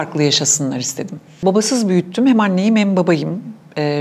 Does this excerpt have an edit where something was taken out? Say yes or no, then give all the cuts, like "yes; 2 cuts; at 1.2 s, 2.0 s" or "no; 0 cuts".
yes; 1 cut; at 1.4 s